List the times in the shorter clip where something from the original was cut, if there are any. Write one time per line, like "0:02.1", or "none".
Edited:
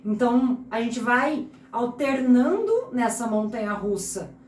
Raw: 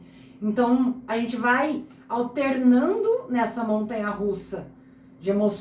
none